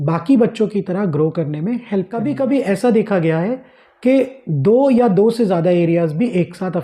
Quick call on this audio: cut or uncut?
cut